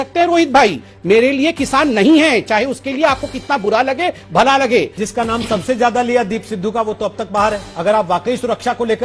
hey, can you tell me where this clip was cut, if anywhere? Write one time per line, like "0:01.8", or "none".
0:05.0
0:07.7